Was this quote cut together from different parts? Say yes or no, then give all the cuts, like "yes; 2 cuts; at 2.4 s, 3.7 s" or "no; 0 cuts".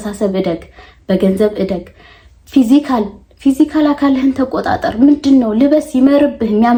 no; 0 cuts